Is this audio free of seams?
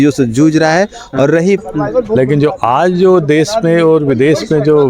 no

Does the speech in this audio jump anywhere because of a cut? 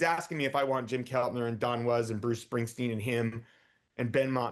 no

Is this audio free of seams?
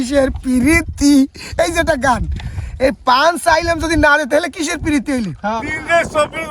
no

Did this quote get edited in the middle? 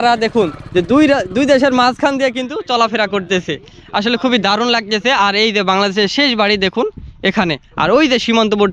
no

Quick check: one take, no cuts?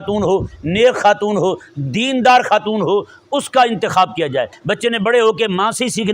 no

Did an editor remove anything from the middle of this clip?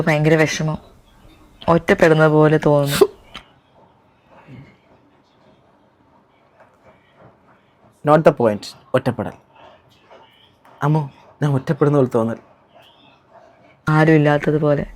no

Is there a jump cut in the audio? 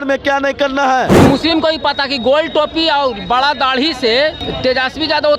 yes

